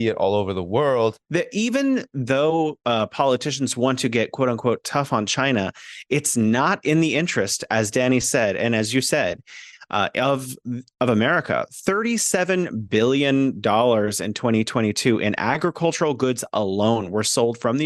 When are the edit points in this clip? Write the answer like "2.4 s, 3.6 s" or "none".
1.2 s